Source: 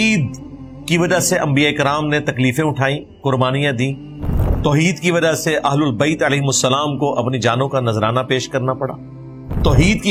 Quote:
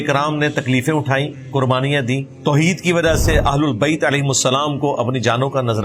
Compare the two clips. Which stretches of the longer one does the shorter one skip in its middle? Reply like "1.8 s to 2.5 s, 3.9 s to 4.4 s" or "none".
4.0 s to 4.5 s